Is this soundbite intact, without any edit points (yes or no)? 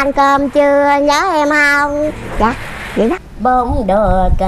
no